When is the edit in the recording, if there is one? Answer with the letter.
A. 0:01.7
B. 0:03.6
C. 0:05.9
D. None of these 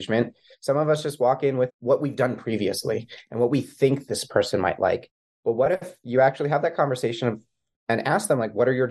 A